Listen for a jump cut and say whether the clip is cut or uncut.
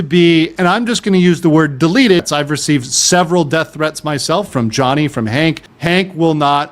cut